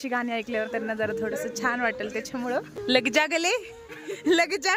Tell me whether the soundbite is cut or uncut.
cut